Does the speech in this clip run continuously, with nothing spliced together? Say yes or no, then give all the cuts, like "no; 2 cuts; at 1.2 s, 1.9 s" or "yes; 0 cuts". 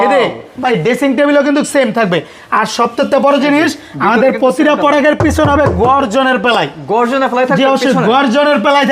yes; 0 cuts